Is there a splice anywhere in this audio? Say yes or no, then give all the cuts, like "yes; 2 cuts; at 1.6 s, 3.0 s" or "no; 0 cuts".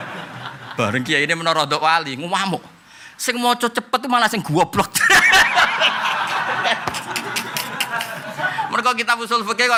no; 0 cuts